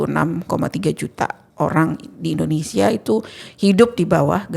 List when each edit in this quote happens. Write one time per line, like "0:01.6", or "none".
none